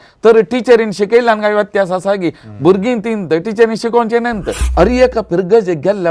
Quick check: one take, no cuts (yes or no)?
no